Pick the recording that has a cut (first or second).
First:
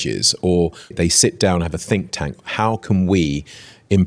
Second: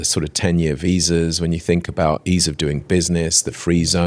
first